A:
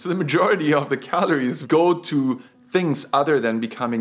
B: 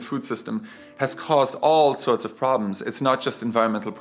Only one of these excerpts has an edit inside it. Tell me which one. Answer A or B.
A